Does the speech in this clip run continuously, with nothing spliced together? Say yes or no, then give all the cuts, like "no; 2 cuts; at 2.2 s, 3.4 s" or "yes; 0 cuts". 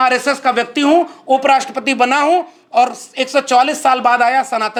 yes; 0 cuts